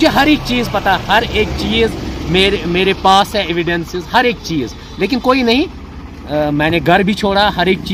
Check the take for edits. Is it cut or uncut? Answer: uncut